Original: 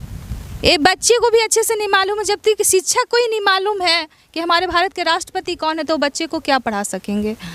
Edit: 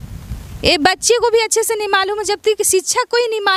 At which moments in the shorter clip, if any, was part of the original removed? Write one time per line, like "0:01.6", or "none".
none